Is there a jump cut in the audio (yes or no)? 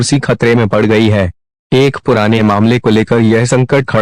yes